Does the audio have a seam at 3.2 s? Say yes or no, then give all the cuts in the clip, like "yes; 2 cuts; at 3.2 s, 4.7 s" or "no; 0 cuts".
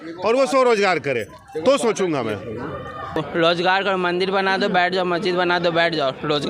yes; 1 cut; at 3.2 s